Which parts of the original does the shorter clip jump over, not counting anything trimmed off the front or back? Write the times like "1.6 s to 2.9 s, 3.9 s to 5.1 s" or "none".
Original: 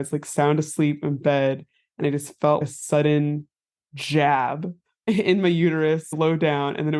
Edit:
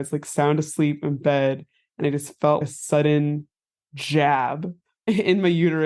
none